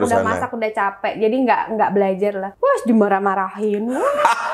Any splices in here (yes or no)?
yes